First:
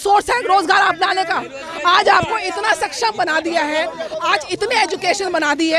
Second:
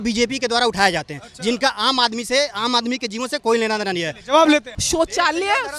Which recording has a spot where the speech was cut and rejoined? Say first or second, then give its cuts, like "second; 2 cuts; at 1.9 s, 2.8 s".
second; 1 cut; at 4.8 s